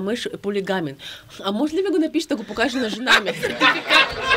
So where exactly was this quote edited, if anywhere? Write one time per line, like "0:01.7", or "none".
none